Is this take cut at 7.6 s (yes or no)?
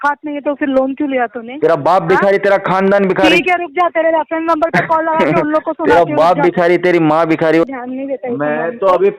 yes